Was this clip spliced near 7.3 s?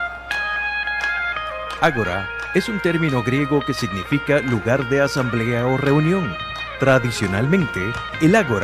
yes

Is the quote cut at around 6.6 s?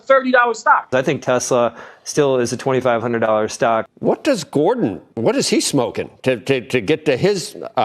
no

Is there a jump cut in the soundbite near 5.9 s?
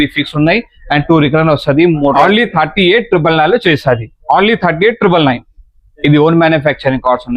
yes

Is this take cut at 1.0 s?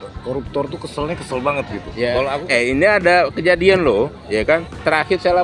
no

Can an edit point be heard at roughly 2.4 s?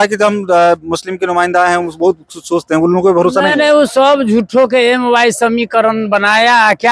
no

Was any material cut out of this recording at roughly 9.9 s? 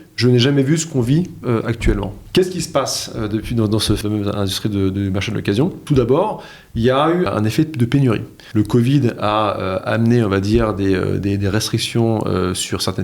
no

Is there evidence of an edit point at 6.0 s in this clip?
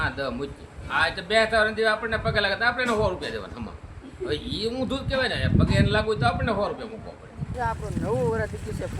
no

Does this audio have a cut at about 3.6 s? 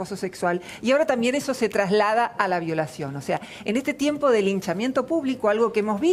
no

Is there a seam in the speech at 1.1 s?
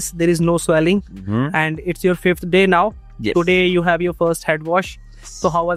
no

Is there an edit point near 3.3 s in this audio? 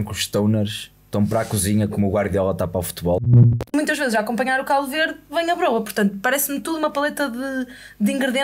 yes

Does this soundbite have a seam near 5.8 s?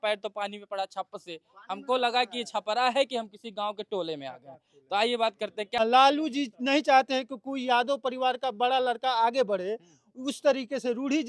yes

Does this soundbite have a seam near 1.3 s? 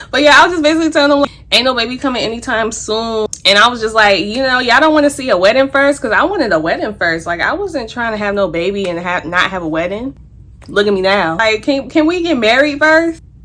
yes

